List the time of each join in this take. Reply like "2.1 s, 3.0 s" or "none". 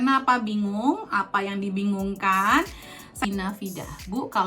3.3 s